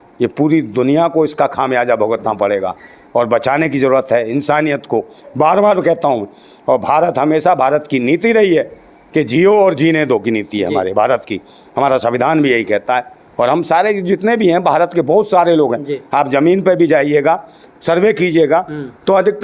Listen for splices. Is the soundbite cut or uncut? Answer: uncut